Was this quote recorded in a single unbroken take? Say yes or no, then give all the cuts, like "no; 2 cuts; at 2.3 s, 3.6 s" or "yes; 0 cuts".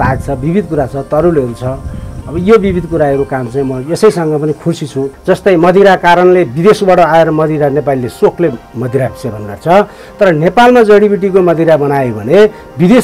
no; 1 cut; at 5.1 s